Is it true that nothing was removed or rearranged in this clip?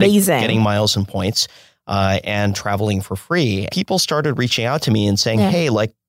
no; 1 cut; at 3.7 s

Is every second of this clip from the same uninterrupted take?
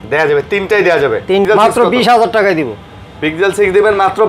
no; 1 cut; at 1.5 s

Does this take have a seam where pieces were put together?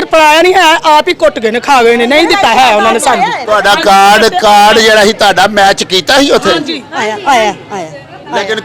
no; 0 cuts

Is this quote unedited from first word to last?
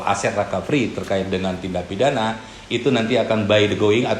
yes; 0 cuts

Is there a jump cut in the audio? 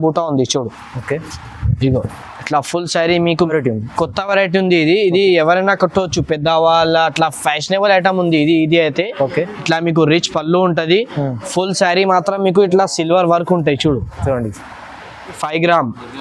yes; 2 cuts; at 3.3 s, 15.4 s

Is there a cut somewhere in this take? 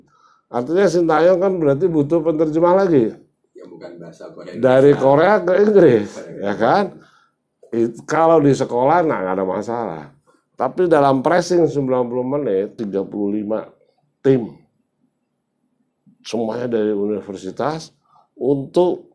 yes; 1 cut; at 12.8 s

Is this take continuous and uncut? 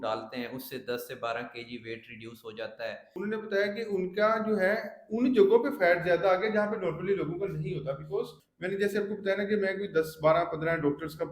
no; 2 cuts; at 3.0 s, 8.4 s

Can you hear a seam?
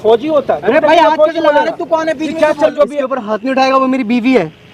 yes; 1 cut; at 2.7 s

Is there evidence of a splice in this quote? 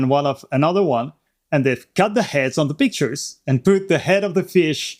no; 0 cuts

